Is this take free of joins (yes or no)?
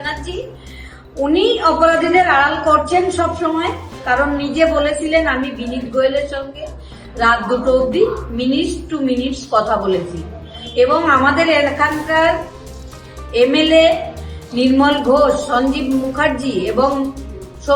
yes